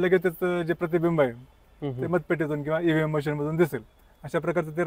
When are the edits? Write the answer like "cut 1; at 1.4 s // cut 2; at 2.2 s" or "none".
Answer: none